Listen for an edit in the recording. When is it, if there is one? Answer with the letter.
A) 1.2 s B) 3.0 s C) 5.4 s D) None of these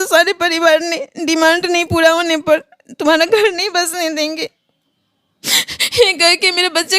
D